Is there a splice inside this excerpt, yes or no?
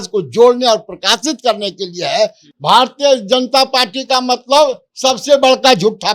yes